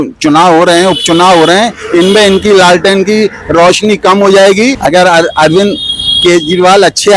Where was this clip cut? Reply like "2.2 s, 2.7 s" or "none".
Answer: 4.8 s